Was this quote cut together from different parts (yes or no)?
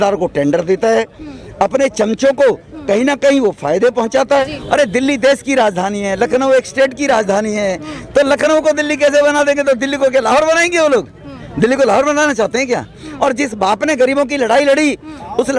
yes